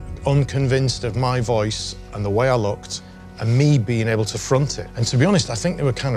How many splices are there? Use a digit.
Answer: 0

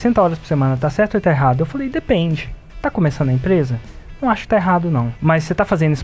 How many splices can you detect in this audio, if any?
1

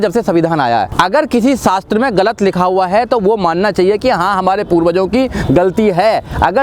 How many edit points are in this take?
1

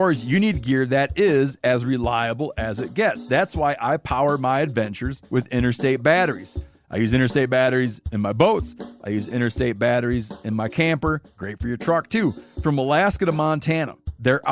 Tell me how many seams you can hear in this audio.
0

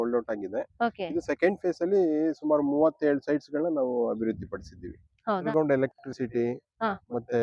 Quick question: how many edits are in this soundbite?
1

